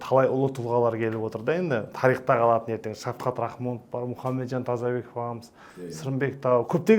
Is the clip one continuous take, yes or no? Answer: yes